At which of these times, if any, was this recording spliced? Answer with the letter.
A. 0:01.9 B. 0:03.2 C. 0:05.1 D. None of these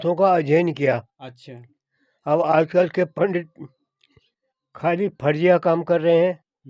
D